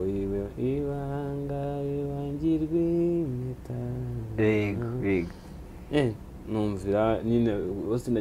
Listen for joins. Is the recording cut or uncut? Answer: uncut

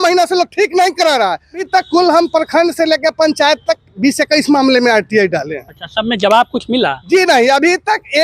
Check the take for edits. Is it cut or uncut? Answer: cut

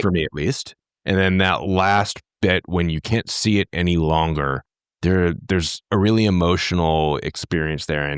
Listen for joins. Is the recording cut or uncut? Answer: uncut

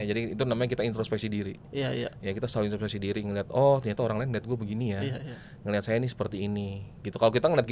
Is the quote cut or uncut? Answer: uncut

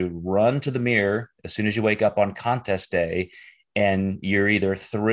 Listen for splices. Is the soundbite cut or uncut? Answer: uncut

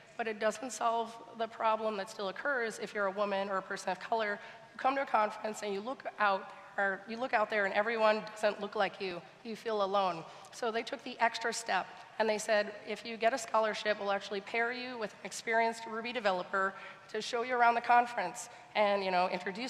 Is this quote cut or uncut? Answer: uncut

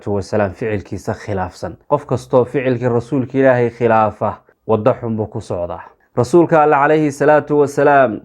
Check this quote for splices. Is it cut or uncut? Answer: cut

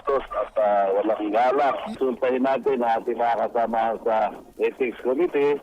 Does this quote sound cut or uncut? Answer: cut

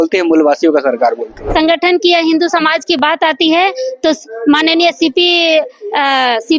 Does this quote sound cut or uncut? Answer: cut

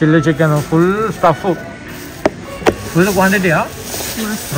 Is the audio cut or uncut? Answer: uncut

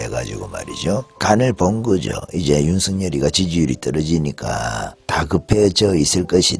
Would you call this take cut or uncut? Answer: cut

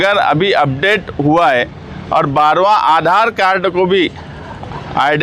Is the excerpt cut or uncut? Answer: uncut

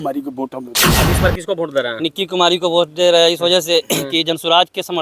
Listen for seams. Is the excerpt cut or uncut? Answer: cut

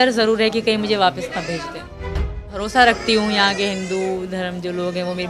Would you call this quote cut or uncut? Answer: cut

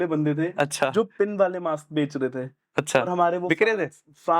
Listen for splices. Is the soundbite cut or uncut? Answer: uncut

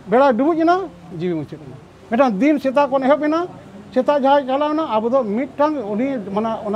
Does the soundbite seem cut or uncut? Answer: uncut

